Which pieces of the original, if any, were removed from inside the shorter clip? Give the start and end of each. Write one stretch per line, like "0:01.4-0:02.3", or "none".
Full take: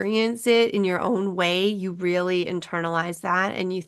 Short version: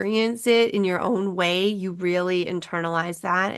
none